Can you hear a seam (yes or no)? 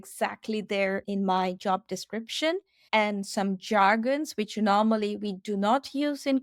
yes